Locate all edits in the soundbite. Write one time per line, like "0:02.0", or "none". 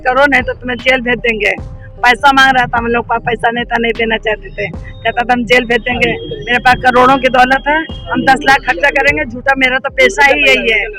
none